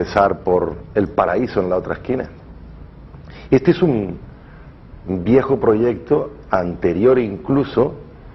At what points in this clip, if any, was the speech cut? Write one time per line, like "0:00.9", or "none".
0:05.4